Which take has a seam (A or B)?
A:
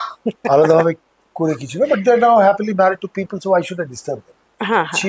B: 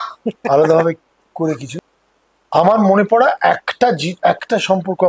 B